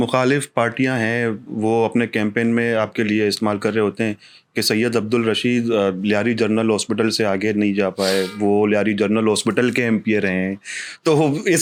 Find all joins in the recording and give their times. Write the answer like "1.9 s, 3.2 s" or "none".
none